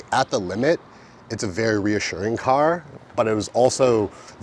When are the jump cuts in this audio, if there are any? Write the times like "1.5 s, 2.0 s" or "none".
none